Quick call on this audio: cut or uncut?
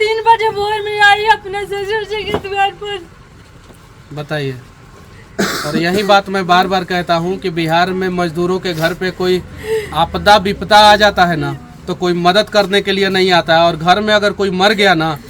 uncut